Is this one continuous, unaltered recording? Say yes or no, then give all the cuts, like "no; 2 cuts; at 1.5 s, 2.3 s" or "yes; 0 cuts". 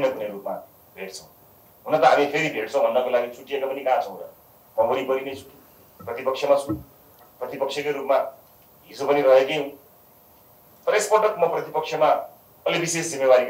yes; 0 cuts